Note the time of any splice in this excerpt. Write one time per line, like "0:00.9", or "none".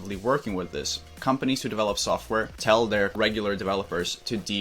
0:01.1
0:02.5
0:03.1